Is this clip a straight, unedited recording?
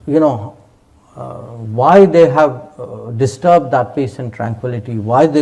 yes; 0 cuts

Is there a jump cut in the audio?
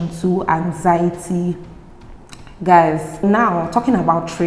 yes; 1 cut; at 3.2 s

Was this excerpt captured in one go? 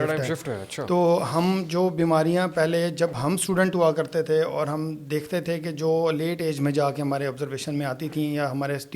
yes; 0 cuts

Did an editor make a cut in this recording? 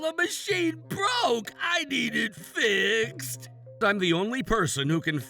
yes; 1 cut; at 3.8 s

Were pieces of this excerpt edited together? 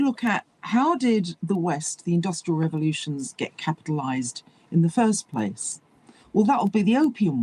no; 0 cuts

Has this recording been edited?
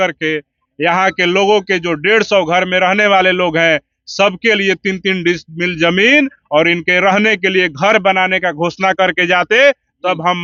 no; 0 cuts

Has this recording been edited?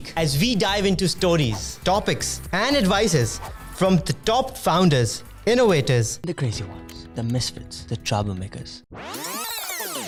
no; 0 cuts

